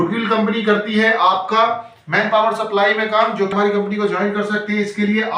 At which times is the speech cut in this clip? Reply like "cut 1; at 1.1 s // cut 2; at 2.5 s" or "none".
cut 1; at 3.5 s